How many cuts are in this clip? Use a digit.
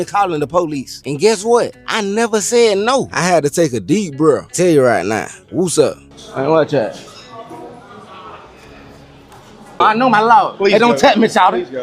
1